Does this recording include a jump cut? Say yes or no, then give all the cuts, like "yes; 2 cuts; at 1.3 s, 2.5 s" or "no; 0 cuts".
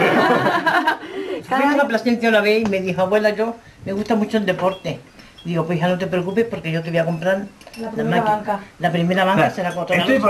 yes; 1 cut; at 1.6 s